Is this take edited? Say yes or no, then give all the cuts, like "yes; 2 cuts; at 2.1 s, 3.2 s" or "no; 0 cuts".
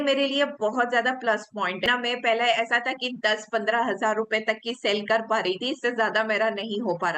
yes; 1 cut; at 1.8 s